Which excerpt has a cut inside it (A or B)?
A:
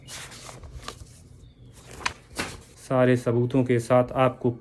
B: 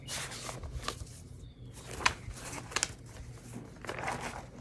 A